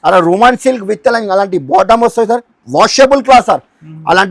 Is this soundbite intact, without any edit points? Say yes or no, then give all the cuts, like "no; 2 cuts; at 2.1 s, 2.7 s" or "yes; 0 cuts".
no; 1 cut; at 2.5 s